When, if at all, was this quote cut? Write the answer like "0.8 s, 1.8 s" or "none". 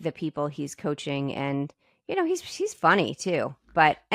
none